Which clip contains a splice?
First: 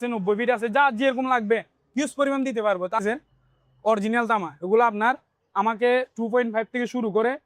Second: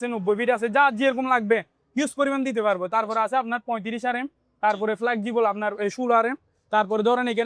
first; 1 cut; at 3.0 s

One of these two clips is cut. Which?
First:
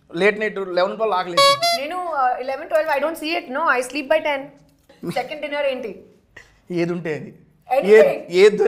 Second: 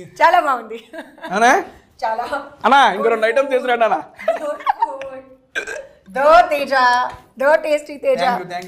first; 1 cut; at 4.9 s

